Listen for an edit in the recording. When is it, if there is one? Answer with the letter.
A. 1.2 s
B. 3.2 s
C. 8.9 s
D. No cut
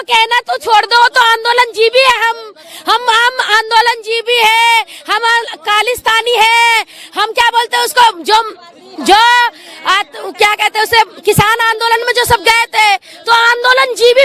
D